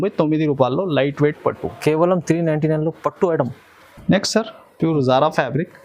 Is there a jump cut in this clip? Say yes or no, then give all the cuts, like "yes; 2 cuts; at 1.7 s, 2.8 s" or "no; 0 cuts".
no; 0 cuts